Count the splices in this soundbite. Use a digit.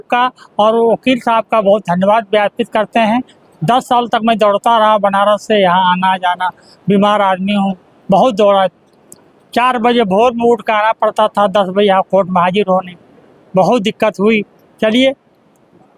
0